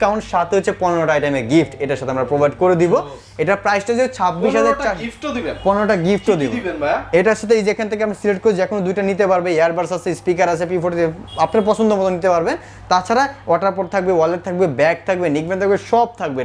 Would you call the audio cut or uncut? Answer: uncut